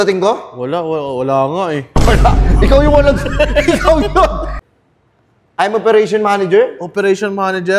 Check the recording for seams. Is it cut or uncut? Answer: cut